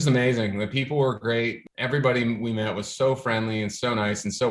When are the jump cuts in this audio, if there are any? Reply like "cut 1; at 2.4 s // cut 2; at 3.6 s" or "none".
cut 1; at 1.6 s